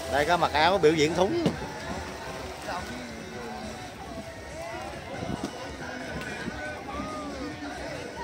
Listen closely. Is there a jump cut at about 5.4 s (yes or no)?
no